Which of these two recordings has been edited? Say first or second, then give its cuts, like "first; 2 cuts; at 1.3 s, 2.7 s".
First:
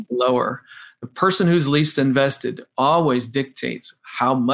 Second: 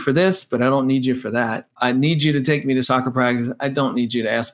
second; 2 cuts; at 1.8 s, 2.8 s